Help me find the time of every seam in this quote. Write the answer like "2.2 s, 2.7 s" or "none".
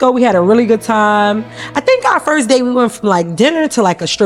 none